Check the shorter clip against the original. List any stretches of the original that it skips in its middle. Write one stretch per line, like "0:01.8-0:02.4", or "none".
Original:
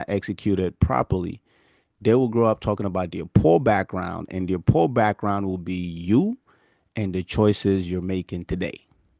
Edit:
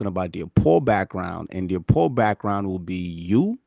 none